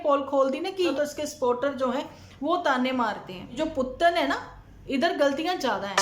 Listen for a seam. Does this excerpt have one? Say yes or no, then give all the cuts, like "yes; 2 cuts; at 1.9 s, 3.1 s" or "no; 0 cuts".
yes; 2 cuts; at 0.9 s, 3.6 s